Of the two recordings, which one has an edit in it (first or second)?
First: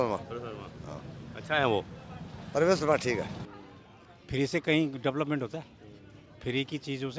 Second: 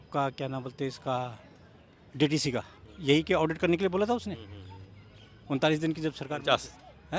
first